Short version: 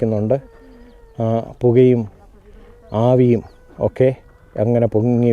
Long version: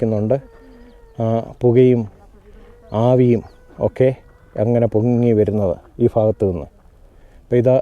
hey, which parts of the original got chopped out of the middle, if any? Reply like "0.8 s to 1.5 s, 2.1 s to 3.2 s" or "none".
none